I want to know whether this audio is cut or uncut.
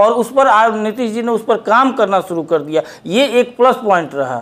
uncut